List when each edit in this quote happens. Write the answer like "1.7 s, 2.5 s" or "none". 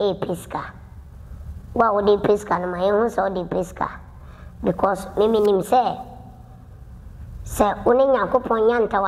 none